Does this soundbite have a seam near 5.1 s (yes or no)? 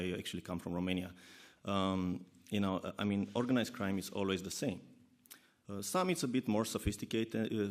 no